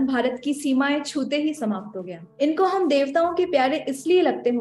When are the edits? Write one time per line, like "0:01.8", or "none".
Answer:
0:02.2